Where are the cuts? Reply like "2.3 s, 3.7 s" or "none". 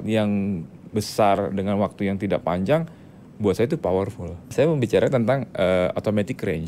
4.4 s